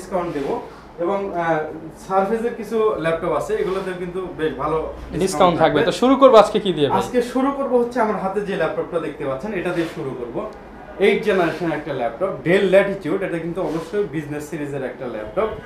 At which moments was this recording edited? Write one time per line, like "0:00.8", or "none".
none